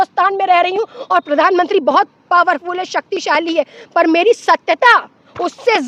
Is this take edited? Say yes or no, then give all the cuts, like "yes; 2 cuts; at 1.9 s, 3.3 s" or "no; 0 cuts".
no; 0 cuts